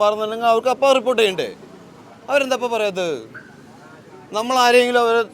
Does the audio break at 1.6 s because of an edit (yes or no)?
no